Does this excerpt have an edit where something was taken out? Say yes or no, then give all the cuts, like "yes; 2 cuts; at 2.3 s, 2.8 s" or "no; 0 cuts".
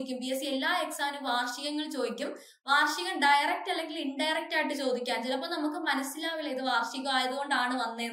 no; 0 cuts